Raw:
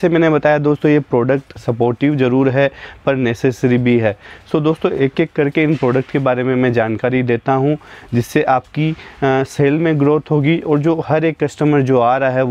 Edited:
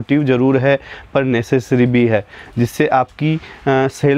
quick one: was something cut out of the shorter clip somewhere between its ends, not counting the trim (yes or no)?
yes